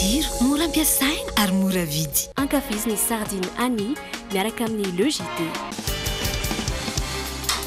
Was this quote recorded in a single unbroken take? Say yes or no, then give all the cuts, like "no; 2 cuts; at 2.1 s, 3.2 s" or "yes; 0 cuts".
yes; 0 cuts